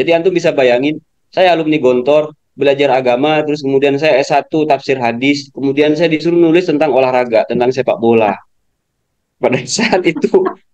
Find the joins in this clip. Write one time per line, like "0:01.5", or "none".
none